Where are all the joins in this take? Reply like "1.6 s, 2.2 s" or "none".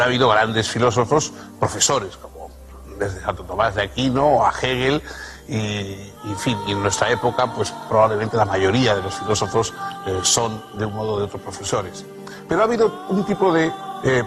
none